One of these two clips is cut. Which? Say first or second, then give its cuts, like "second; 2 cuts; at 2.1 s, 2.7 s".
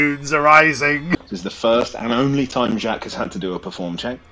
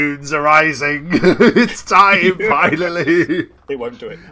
first; 1 cut; at 1.1 s